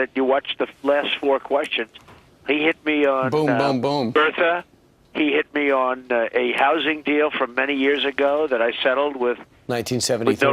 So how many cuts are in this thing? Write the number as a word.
one